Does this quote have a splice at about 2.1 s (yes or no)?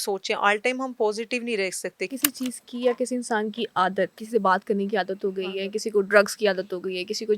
yes